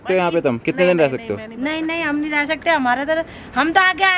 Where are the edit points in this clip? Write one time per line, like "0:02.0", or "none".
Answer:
none